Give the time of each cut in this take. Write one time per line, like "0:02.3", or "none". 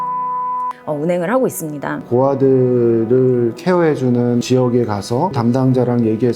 0:02.0
0:04.4
0:05.4